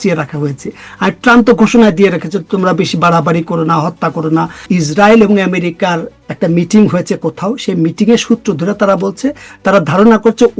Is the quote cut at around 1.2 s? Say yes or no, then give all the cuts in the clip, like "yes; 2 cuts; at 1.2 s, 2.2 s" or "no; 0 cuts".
no; 1 cut; at 4.7 s